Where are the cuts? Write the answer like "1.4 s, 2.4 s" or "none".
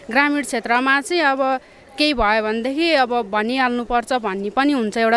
none

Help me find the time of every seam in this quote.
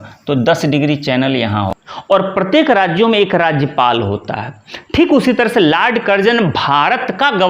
1.7 s

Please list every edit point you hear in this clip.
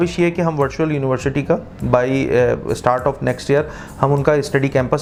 none

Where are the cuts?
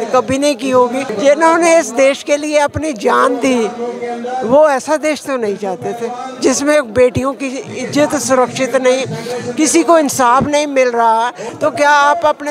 1.1 s, 11.5 s

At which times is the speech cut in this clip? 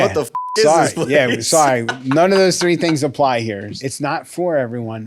3.7 s

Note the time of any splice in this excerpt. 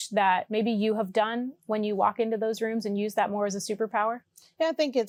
none

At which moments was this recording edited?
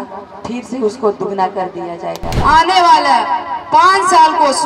2.4 s

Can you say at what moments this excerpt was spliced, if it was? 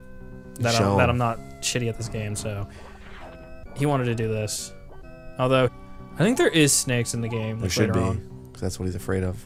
none

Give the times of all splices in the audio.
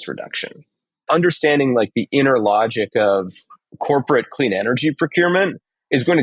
1.1 s

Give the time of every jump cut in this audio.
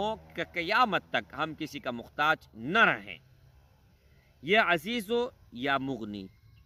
none

